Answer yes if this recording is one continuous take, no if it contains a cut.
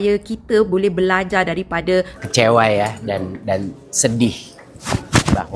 no